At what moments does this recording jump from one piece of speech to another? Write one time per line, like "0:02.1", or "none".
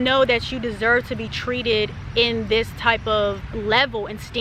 0:03.5